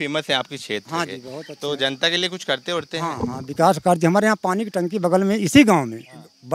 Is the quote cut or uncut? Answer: uncut